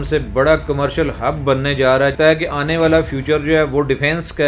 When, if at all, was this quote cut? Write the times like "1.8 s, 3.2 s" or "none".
2.1 s